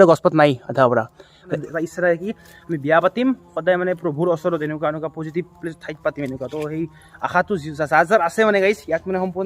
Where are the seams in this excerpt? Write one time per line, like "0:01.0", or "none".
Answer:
0:01.6